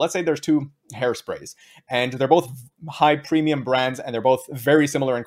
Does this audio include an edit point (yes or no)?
no